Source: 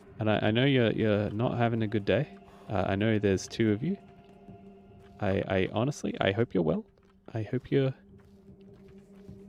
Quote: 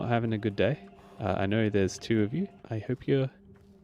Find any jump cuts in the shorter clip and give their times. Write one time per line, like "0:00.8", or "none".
0:02.7